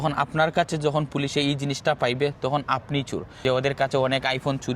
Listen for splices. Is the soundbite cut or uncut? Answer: cut